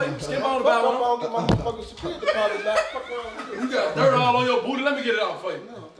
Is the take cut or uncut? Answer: uncut